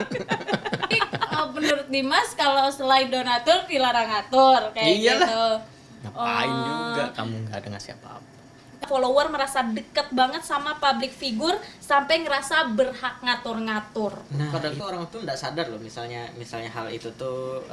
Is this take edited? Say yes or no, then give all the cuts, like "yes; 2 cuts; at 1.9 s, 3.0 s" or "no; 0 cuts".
yes; 3 cuts; at 1.3 s, 8.8 s, 14.5 s